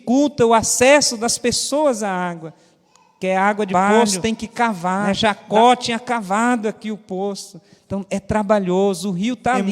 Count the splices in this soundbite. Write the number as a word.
one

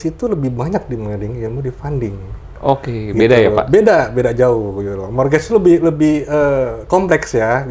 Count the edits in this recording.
zero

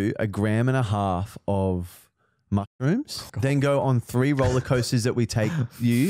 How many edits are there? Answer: one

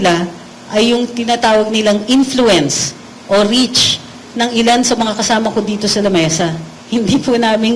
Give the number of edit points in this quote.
one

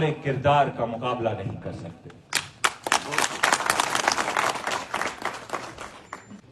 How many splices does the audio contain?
zero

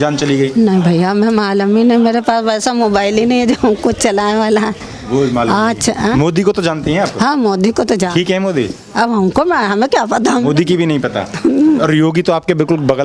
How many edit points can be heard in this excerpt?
zero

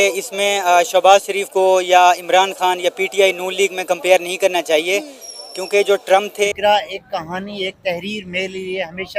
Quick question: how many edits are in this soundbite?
one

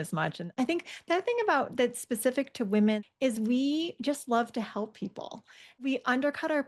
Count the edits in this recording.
two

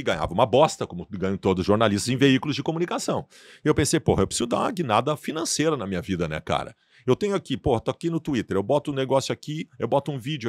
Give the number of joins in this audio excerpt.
zero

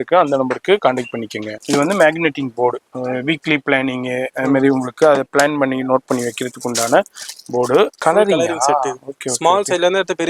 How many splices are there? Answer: two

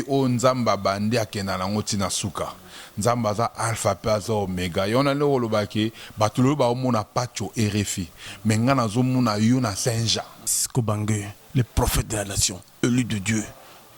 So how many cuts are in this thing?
one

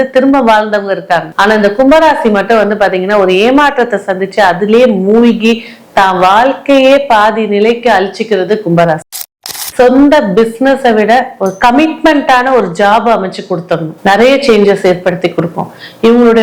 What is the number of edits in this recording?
one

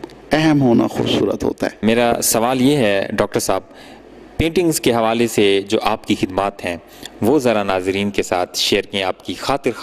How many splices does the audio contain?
zero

